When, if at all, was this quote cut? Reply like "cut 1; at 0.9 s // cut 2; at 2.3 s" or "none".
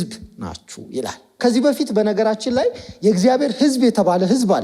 cut 1; at 1.3 s